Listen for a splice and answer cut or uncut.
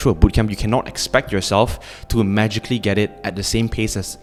uncut